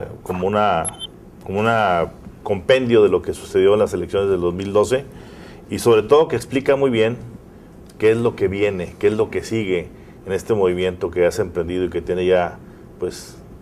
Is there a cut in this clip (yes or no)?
no